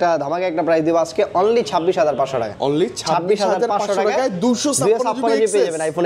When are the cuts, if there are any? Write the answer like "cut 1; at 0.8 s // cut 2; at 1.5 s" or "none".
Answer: none